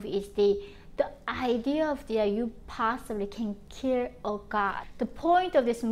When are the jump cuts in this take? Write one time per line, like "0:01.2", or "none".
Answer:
0:04.8